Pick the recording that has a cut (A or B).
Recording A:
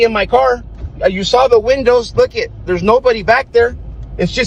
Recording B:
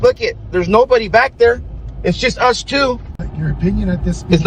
B